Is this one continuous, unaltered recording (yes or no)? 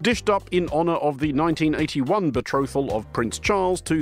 yes